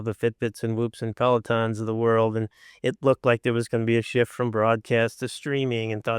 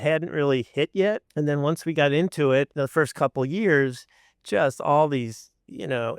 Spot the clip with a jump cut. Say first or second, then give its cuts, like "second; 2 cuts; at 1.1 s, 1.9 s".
second; 2 cuts; at 1.3 s, 2.7 s